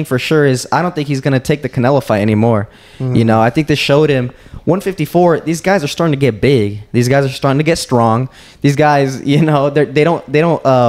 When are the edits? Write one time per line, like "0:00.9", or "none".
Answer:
none